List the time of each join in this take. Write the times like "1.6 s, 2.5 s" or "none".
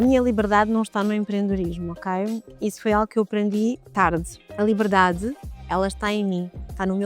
4.4 s, 5.5 s